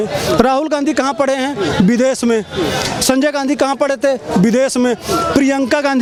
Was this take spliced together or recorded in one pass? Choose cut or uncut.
uncut